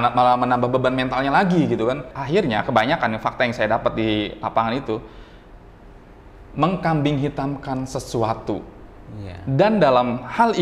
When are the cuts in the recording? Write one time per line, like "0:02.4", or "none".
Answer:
0:02.1